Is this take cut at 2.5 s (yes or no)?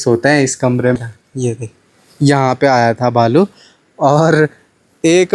no